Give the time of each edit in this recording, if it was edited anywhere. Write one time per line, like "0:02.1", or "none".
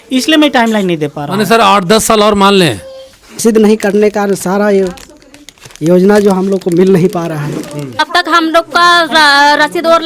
0:03.4
0:08.0